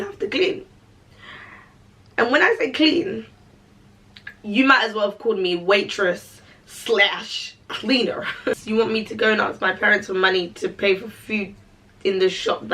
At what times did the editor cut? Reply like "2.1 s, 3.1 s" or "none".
8.6 s